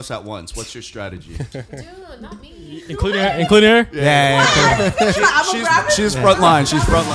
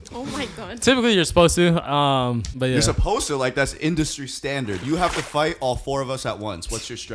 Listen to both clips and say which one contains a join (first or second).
second